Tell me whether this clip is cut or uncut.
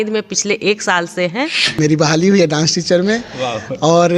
cut